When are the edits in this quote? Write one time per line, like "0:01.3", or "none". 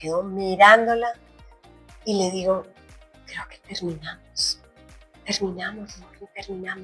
none